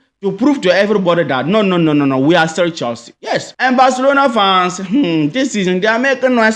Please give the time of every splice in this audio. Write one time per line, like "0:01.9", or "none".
0:03.5